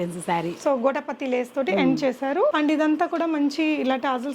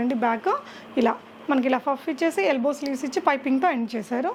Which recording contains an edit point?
first; 1 cut; at 2.5 s

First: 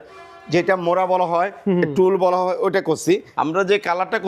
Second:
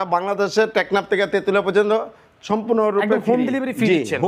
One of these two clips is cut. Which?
first; 1 cut; at 3.3 s

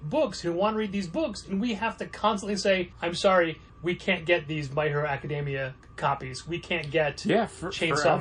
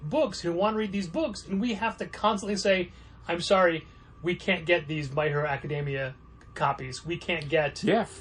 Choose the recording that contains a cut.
first; 3 cuts; at 2.9 s, 3.7 s, 5.8 s

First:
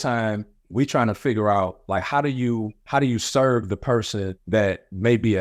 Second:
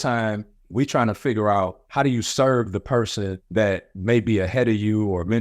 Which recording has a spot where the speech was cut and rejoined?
second; 1 cut; at 1.8 s

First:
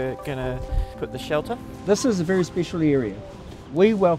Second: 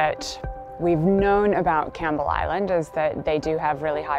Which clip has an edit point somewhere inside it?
first; 1 cut; at 1.5 s

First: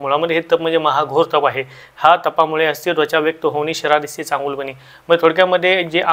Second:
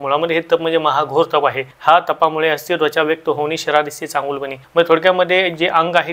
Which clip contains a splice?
second; 2 cuts; at 1.7 s, 4.6 s

